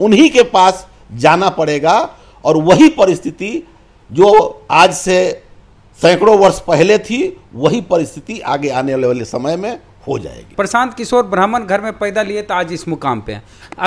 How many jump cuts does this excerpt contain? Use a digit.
1